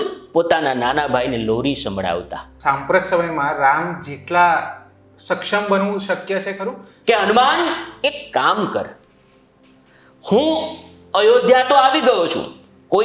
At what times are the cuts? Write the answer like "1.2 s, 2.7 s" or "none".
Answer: 2.5 s, 6.9 s